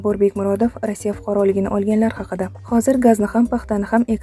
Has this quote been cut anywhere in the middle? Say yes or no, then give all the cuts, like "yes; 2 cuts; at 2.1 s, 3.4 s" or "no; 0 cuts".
yes; 1 cut; at 2.5 s